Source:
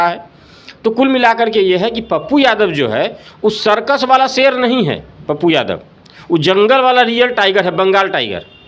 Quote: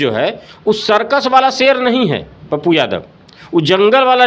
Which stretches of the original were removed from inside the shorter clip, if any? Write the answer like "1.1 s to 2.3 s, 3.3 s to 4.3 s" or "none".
none